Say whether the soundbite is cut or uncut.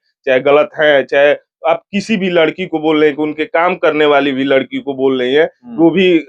uncut